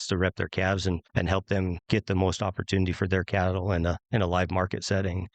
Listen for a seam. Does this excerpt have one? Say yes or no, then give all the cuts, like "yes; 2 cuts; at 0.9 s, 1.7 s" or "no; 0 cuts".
yes; 1 cut; at 1.3 s